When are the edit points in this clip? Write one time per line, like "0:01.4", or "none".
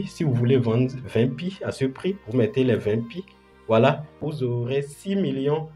0:04.1